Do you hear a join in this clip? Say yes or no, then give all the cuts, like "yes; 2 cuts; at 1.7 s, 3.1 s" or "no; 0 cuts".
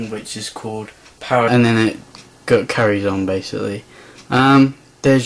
no; 0 cuts